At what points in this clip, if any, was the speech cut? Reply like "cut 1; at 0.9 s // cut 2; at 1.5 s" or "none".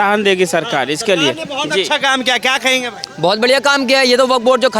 none